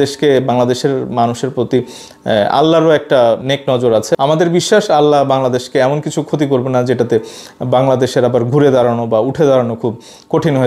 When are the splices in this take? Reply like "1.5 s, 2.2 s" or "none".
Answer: none